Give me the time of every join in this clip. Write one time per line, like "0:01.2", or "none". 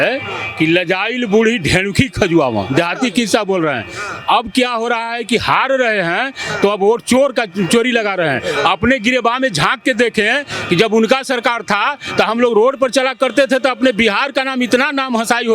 none